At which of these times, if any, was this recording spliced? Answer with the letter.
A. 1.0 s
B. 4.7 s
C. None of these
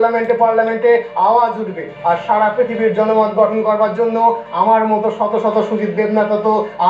C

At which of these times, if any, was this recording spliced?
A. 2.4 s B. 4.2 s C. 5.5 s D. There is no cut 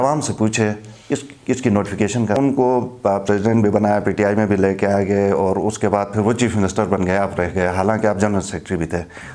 A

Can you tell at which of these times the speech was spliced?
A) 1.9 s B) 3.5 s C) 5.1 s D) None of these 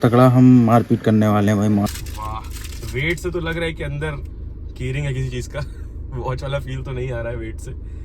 A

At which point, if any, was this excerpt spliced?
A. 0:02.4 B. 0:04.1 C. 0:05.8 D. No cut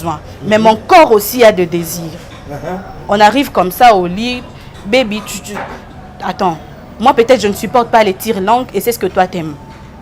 D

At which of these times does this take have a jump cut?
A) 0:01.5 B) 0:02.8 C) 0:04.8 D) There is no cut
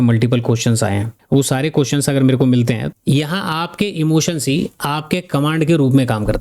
B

